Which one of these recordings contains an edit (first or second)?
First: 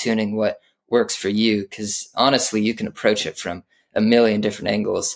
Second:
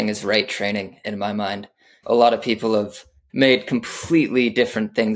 second